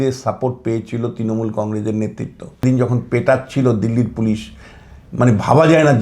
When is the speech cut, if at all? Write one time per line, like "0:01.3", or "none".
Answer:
0:02.6